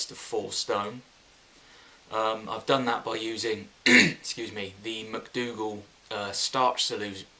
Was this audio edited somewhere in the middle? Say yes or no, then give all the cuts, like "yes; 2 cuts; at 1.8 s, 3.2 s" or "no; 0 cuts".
yes; 1 cut; at 2.2 s